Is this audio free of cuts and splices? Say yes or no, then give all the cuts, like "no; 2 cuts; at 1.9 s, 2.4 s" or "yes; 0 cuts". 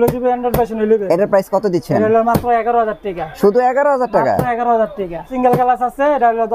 no; 1 cut; at 5.3 s